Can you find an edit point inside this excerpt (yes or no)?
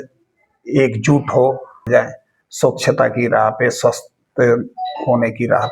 yes